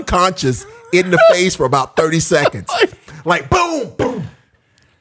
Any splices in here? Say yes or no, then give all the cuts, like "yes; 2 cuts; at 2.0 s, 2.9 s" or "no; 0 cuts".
no; 0 cuts